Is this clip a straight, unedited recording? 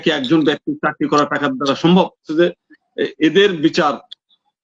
no; 1 cut; at 2.3 s

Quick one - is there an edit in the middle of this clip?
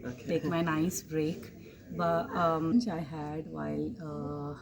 yes; 1 cut; at 2.7 s

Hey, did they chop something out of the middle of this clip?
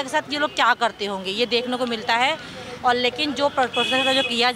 no; 0 cuts

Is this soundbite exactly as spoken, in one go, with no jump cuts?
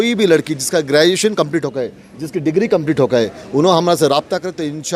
yes; 0 cuts

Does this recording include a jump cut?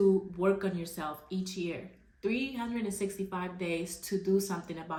no; 0 cuts

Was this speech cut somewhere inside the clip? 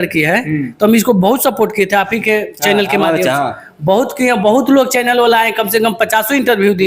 no; 0 cuts

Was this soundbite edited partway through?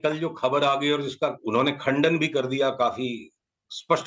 yes; 1 cut; at 1.4 s

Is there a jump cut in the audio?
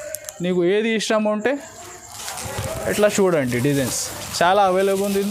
no; 0 cuts

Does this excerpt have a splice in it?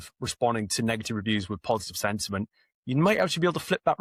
no; 0 cuts

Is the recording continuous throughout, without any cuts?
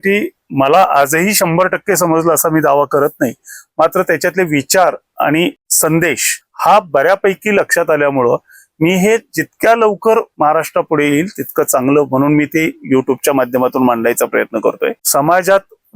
no; 2 cuts; at 10.3 s, 15.0 s

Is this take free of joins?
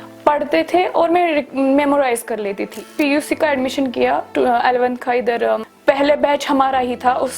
no; 2 cuts; at 2.9 s, 5.7 s

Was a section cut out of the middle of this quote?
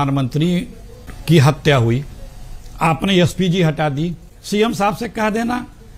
yes; 1 cut; at 4.3 s

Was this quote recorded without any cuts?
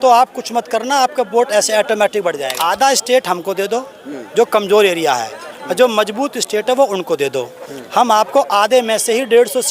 no; 1 cut; at 2.4 s

